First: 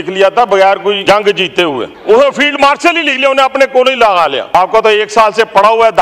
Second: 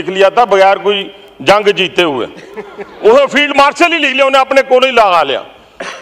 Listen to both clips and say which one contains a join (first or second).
first